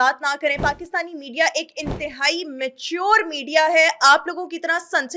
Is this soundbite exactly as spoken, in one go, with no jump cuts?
yes; 0 cuts

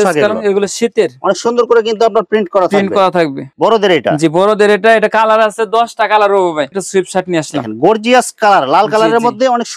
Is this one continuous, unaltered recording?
no; 2 cuts; at 3.5 s, 6.7 s

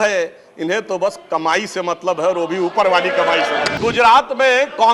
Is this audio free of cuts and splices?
no; 1 cut; at 3.7 s

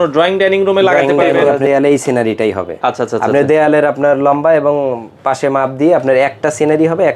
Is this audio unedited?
no; 1 cut; at 1.6 s

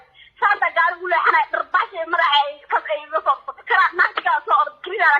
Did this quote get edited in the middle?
yes; 1 cut; at 3.7 s

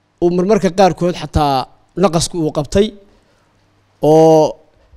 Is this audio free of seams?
yes; 0 cuts

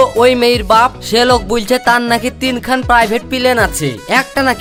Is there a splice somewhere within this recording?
no; 0 cuts

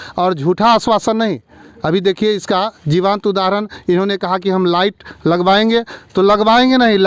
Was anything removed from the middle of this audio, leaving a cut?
no; 0 cuts

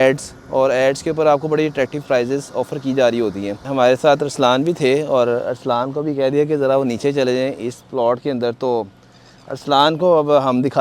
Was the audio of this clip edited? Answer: yes; 1 cut; at 3.6 s

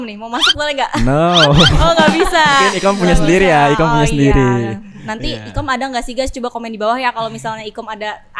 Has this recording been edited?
no; 0 cuts

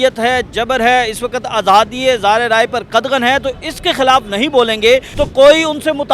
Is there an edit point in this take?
yes; 1 cut; at 5.1 s

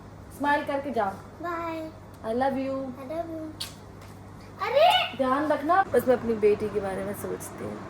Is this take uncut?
no; 1 cut; at 5.9 s

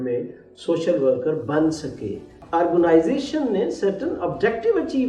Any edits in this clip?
yes; 1 cut; at 2.4 s

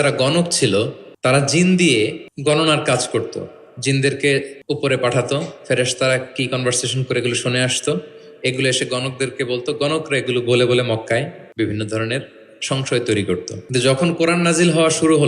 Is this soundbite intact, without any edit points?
no; 5 cuts; at 1.0 s, 2.3 s, 4.5 s, 11.4 s, 13.6 s

